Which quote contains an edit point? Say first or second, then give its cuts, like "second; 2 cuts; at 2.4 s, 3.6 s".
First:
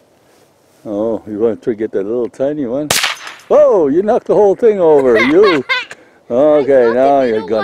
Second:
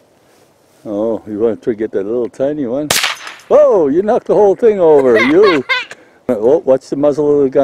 second; 1 cut; at 6.3 s